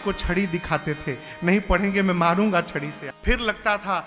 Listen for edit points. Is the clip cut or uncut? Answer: cut